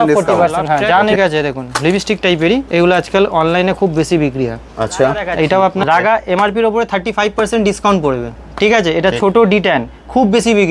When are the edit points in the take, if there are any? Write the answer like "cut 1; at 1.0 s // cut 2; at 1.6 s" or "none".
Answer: cut 1; at 1.1 s // cut 2; at 5.8 s